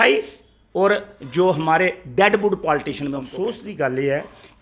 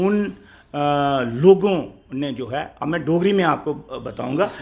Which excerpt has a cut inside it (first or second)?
first